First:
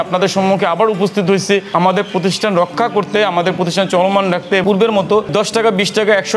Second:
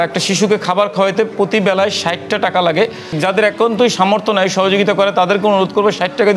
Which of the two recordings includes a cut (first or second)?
first